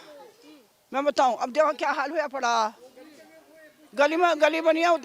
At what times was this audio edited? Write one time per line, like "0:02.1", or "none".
none